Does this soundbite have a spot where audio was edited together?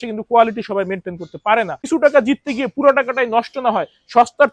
yes; 1 cut; at 1.9 s

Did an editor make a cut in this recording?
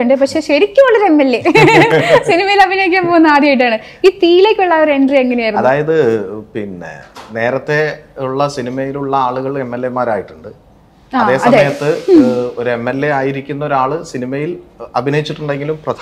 no; 0 cuts

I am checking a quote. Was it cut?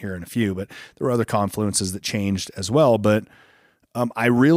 no; 0 cuts

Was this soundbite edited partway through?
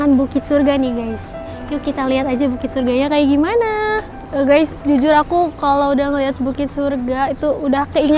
no; 0 cuts

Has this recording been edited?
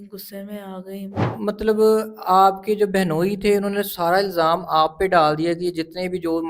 yes; 1 cut; at 1.3 s

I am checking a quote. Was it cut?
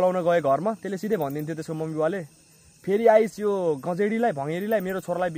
no; 0 cuts

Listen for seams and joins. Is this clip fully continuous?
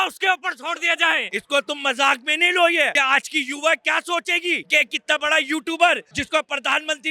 no; 4 cuts; at 1.3 s, 2.9 s, 4.6 s, 6.1 s

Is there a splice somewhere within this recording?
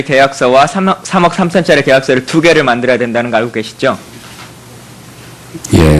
yes; 1 cut; at 3.4 s

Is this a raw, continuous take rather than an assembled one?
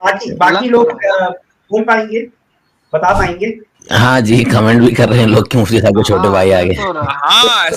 no; 1 cut; at 3.7 s

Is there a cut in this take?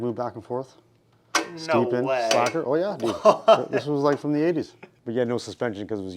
yes; 1 cut; at 4.9 s

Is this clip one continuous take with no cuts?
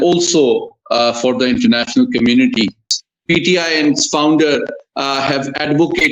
no; 1 cut; at 3.0 s

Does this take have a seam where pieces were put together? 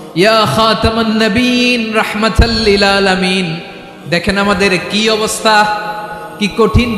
no; 0 cuts

